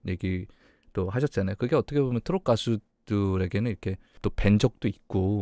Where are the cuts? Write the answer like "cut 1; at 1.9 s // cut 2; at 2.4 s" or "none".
cut 1; at 4.2 s